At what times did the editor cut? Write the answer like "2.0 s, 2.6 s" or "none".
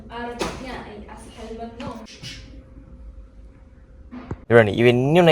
2.1 s, 4.4 s